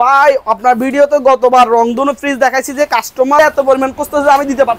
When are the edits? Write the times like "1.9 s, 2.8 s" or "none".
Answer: 3.4 s